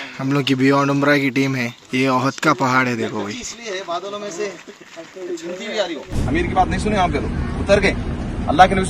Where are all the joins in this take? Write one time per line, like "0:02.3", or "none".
0:01.8
0:06.1